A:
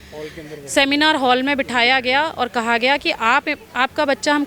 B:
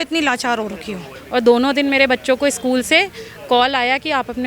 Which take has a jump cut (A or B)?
B